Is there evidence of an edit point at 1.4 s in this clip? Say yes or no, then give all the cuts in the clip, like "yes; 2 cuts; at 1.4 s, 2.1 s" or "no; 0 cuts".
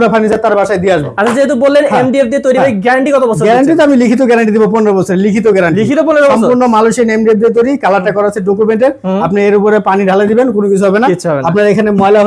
no; 0 cuts